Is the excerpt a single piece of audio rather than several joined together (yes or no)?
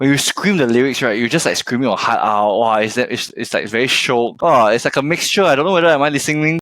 no